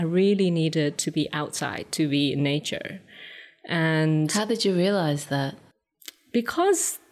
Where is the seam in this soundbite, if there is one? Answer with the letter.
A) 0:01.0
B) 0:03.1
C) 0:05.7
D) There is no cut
D